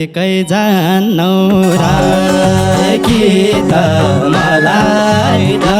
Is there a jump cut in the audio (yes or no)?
no